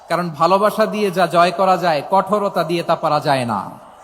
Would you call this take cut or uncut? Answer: uncut